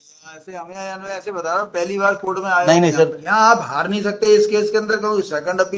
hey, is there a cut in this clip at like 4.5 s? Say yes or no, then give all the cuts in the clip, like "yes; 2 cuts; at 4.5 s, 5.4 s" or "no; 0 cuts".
no; 1 cut; at 3.2 s